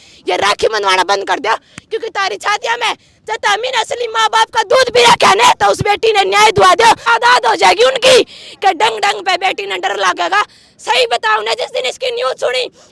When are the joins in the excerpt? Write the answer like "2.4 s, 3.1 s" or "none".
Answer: 7.0 s